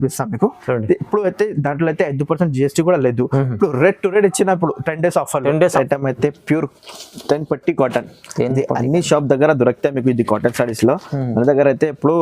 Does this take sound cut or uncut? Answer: cut